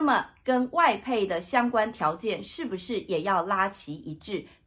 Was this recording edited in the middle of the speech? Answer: no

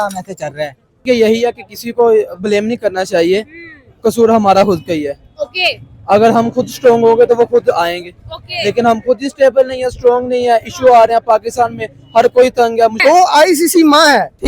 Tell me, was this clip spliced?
yes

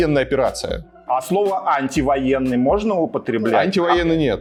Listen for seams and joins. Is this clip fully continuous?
yes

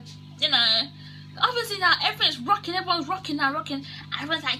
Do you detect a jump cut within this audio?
no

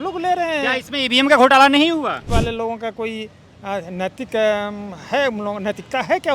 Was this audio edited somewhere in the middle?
yes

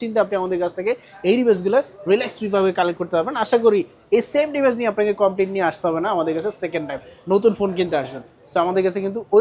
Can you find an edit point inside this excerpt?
no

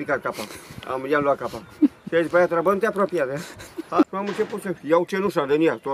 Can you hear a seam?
yes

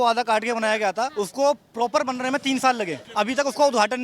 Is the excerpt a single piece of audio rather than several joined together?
no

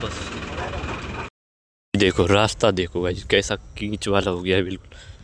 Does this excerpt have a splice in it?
yes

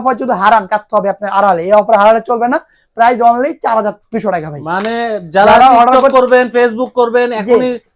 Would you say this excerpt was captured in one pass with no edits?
yes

